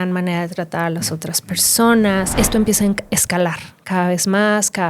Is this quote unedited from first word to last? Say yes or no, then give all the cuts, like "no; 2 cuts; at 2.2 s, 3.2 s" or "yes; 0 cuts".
no; 1 cut; at 2.3 s